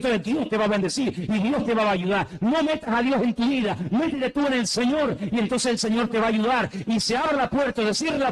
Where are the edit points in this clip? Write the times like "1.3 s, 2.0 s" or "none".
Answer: none

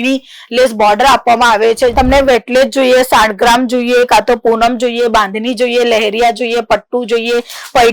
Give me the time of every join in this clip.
1.9 s

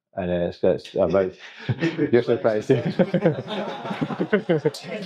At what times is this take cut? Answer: none

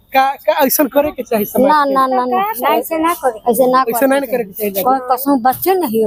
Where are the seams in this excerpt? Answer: none

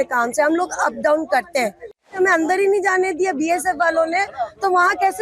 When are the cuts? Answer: 2.1 s

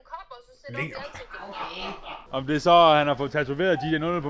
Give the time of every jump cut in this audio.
2.2 s

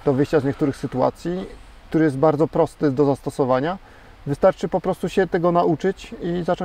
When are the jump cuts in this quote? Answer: none

